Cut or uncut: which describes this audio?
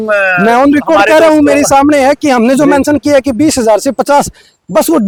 uncut